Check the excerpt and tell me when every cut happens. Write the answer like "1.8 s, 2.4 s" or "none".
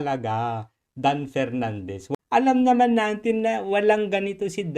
2.0 s